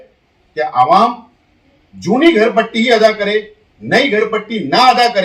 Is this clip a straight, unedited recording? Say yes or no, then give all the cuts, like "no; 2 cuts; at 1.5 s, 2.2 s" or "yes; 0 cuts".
yes; 0 cuts